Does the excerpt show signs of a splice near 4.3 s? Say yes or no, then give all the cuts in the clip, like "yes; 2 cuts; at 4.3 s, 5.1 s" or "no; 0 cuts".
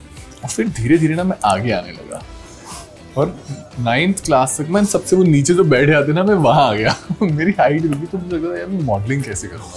no; 0 cuts